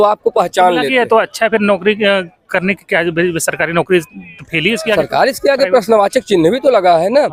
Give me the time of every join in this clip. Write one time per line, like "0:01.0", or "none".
none